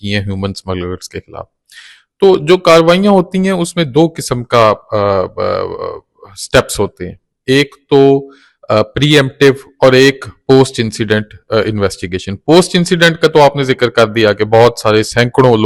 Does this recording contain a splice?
no; 0 cuts

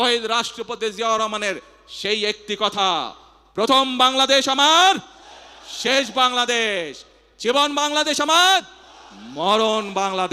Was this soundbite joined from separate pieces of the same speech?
no; 0 cuts

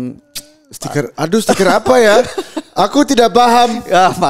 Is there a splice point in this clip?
no; 0 cuts

